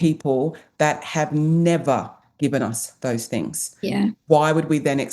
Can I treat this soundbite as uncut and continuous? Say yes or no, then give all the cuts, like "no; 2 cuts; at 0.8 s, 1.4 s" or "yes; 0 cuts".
yes; 0 cuts